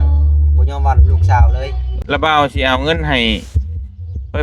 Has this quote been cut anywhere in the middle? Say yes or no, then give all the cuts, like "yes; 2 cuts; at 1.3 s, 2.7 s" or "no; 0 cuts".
yes; 1 cut; at 1.9 s